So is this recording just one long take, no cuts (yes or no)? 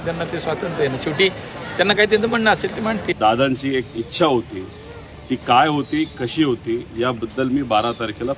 no